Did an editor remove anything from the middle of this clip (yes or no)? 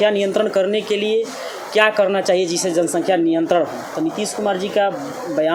no